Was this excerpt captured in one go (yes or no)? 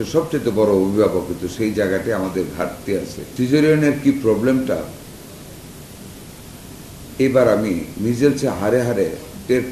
no